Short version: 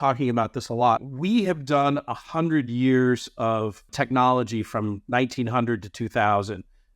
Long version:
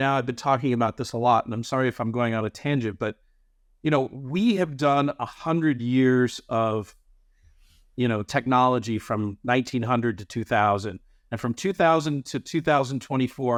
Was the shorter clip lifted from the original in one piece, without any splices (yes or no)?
no